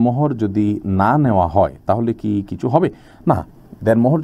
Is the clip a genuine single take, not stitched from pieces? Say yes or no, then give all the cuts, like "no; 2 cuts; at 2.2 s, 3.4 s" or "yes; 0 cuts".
yes; 0 cuts